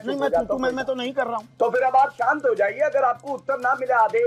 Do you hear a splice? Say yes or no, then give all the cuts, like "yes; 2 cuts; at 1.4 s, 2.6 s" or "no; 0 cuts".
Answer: no; 0 cuts